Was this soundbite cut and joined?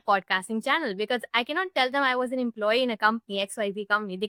no; 0 cuts

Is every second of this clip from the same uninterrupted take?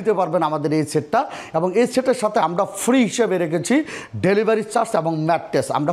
yes; 0 cuts

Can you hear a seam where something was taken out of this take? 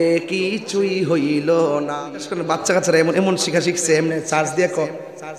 yes; 1 cut; at 1.9 s

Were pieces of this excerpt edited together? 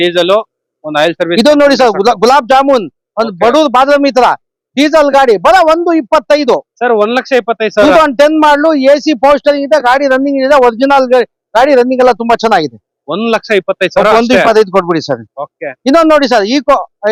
no; 0 cuts

